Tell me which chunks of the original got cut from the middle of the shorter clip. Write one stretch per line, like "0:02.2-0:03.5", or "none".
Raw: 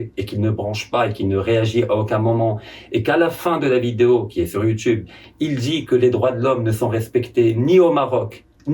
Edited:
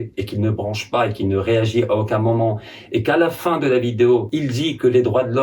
0:04.3-0:05.3